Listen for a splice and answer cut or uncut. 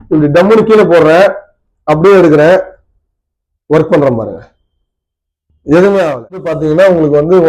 cut